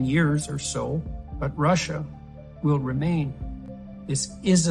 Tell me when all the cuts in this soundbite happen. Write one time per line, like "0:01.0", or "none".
0:01.2

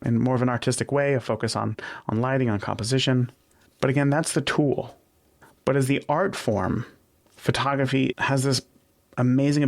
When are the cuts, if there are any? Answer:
0:08.1

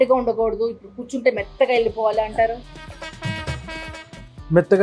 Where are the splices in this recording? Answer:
none

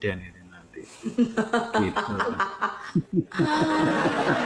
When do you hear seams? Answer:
none

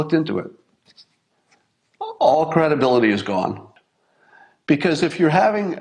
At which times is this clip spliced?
0:03.7

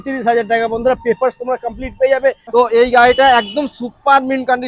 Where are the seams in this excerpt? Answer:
0:02.5

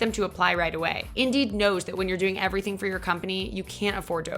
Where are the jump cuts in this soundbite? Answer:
0:01.0

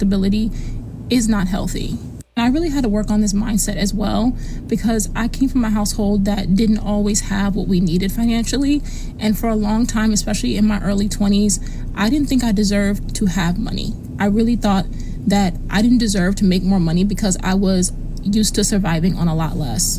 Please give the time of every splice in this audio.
none

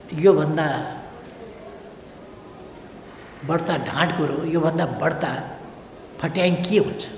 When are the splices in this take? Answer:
none

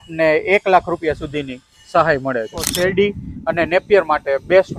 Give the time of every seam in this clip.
0:02.7

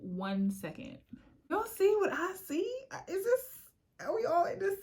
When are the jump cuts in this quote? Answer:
0:01.5

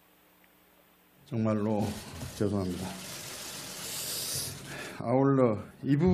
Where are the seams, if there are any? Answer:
0:03.6

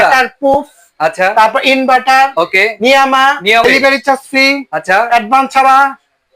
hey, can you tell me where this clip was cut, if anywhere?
0:03.6

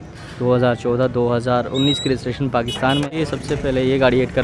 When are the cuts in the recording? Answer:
0:03.1

